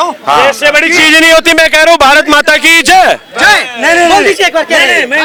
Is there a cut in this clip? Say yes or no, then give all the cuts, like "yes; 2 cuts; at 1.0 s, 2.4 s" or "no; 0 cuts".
no; 0 cuts